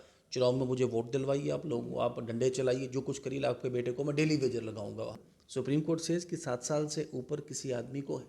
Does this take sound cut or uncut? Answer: cut